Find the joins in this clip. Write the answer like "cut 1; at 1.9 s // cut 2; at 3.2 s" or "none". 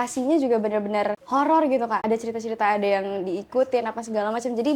cut 1; at 1.2 s // cut 2; at 2.0 s